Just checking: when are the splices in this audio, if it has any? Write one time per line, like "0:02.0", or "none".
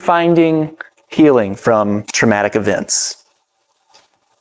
none